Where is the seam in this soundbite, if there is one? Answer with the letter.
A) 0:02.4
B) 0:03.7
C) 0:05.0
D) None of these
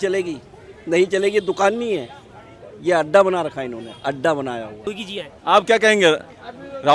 C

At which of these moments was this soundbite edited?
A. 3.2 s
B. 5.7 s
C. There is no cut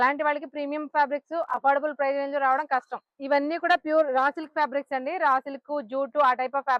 A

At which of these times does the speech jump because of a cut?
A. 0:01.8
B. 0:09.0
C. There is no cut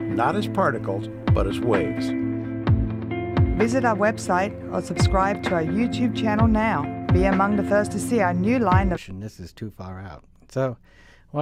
C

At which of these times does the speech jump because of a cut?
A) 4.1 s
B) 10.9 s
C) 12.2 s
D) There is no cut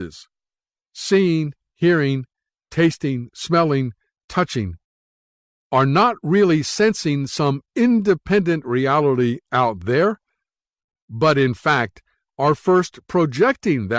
A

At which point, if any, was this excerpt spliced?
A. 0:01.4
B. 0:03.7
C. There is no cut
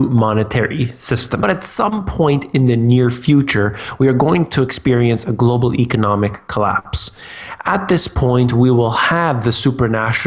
A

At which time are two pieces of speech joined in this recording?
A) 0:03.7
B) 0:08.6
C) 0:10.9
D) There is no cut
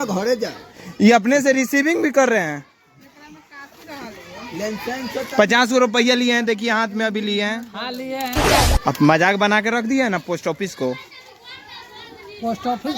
B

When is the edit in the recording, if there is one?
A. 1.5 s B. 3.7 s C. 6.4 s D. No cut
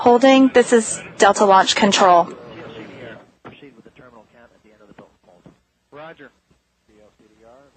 B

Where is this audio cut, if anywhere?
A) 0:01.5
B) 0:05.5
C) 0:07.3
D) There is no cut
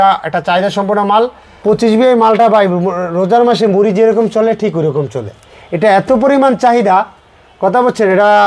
A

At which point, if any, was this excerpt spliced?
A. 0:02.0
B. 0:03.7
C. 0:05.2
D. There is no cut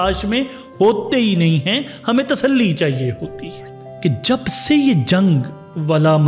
B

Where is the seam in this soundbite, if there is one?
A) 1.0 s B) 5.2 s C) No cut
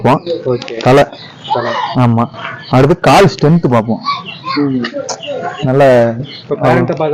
C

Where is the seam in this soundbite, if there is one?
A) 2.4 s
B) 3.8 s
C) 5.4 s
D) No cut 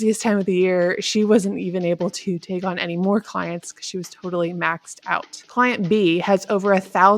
C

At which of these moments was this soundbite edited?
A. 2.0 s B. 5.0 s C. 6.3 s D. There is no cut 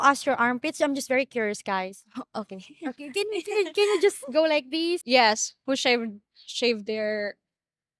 B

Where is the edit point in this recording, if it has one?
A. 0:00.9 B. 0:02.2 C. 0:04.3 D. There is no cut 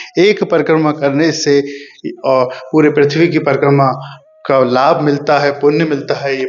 D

